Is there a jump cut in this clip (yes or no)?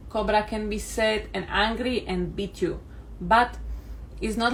no